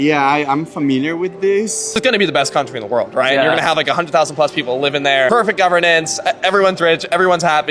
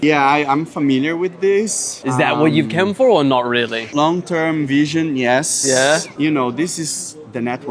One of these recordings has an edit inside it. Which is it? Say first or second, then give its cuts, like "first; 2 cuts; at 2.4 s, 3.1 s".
first; 2 cuts; at 2.0 s, 5.3 s